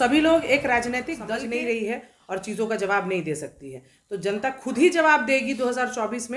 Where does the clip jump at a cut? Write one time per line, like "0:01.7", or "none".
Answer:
0:01.2

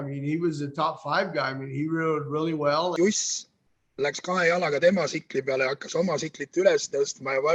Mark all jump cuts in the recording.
0:02.9

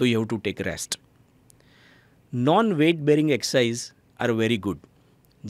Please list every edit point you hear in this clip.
none

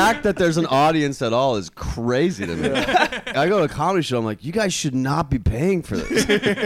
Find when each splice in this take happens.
0:03.3

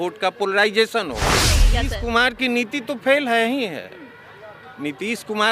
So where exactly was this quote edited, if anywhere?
0:01.6

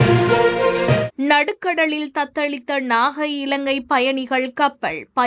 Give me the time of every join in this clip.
0:01.1

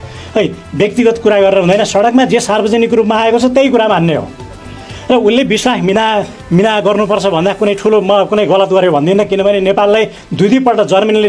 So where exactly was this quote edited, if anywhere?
none

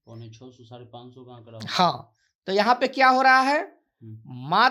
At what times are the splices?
none

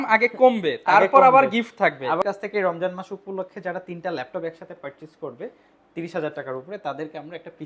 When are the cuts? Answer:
0:02.2

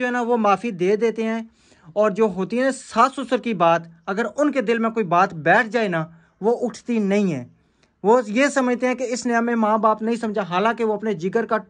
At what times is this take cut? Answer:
none

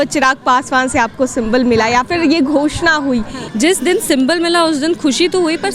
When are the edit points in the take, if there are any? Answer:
0:03.4

